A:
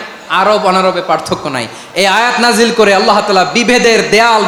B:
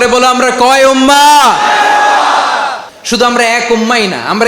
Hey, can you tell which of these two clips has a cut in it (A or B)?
B